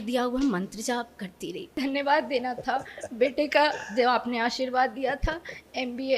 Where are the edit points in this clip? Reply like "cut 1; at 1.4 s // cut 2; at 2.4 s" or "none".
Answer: cut 1; at 1.7 s